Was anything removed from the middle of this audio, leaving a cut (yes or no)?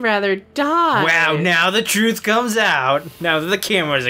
no